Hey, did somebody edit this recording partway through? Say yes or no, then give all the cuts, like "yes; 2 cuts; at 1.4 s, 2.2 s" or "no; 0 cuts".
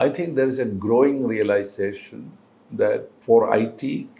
yes; 1 cut; at 3.1 s